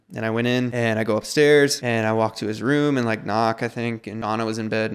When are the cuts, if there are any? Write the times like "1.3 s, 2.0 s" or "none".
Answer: 0.7 s, 1.8 s, 4.2 s